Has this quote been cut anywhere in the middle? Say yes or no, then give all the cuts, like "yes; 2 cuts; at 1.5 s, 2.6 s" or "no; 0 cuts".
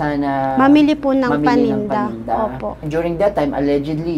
yes; 1 cut; at 2.8 s